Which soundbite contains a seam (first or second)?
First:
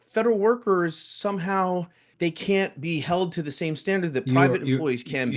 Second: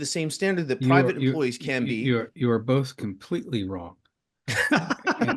first